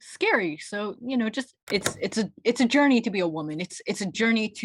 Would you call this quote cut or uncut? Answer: cut